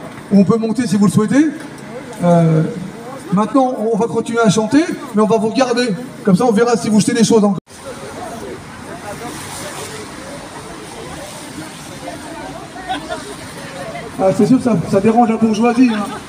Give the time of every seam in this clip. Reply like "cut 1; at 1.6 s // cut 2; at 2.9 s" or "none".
cut 1; at 7.8 s